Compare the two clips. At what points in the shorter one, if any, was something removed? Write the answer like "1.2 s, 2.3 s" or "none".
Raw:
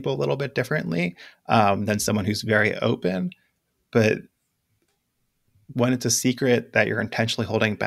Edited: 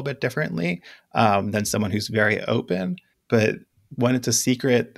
3.1 s, 3.8 s

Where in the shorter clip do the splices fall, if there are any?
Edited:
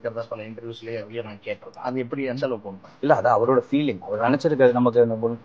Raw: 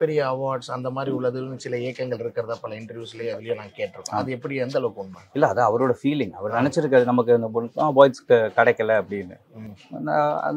none

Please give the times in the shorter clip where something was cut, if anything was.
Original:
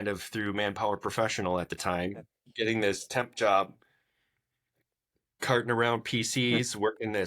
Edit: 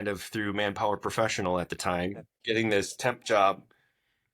2.3 s

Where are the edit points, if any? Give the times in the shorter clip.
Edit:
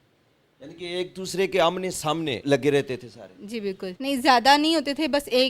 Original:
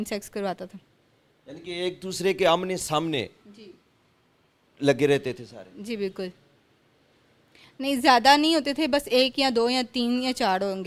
2.4 s, 3.9 s

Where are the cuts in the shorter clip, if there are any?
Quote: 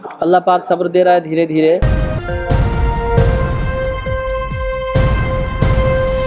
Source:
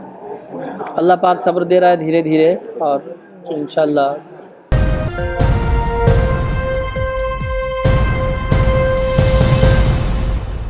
1.9 s

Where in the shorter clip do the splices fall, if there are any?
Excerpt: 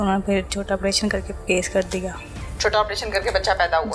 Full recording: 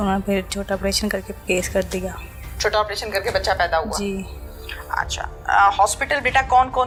none

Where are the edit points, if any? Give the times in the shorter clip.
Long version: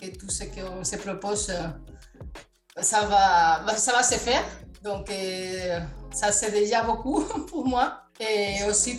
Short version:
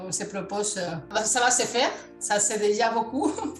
1.1 s, 2.1 s

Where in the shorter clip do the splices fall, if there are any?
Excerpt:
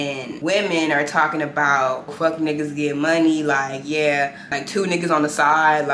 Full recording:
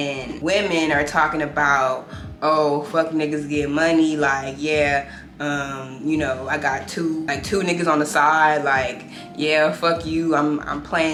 2.1 s, 4.5 s

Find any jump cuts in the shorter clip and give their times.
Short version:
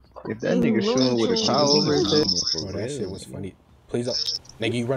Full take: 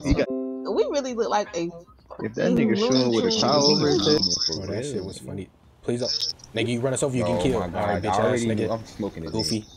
none

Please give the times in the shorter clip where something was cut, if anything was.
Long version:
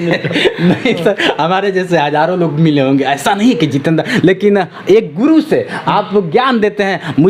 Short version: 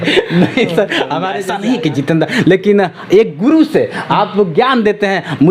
1.4 s

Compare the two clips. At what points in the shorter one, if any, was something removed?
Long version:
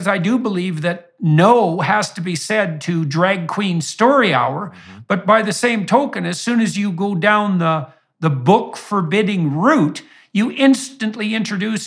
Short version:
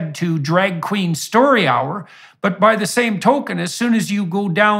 none

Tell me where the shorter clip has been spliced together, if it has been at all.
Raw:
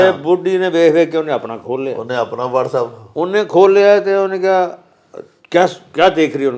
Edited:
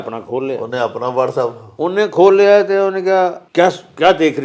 3.4 s

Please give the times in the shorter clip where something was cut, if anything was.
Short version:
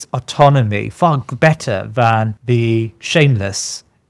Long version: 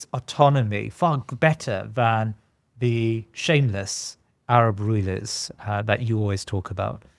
2.4 s

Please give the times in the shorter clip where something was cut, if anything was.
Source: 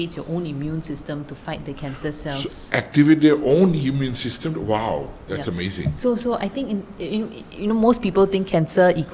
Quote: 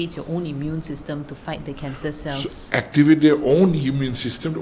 none

